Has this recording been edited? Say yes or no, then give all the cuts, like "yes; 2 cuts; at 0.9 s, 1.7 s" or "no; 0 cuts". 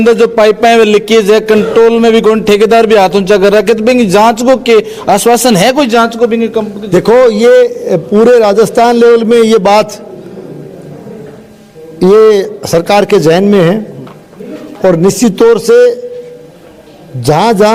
no; 0 cuts